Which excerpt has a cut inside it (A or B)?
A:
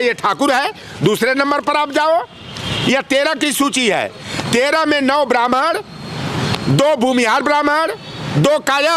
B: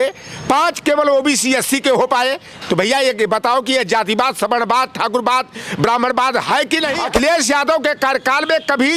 B